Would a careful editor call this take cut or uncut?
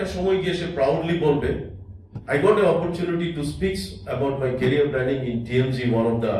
uncut